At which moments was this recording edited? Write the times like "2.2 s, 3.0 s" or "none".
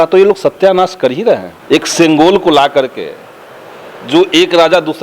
1.5 s